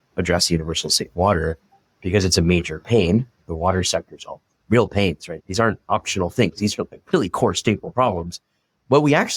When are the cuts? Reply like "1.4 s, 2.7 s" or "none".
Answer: 5.3 s